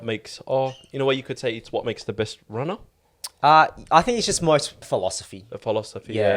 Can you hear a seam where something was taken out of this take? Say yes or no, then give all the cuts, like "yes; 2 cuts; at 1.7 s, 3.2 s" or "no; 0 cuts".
yes; 1 cut; at 4.9 s